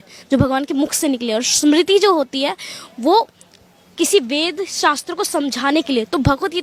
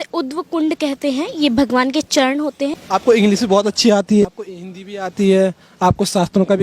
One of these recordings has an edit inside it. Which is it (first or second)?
second